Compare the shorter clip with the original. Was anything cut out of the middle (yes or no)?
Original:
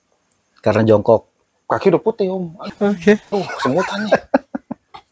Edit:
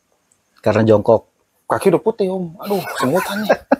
yes